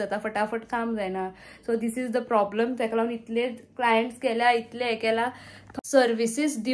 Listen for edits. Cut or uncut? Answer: cut